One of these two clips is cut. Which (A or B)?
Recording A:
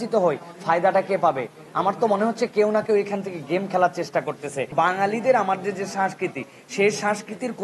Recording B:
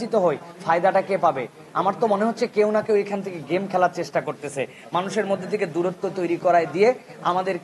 A